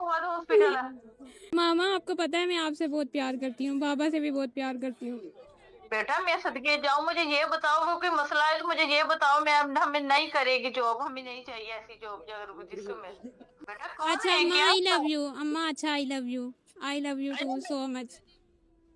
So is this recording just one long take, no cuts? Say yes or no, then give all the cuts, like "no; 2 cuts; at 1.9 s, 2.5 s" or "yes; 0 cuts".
no; 2 cuts; at 1.5 s, 13.5 s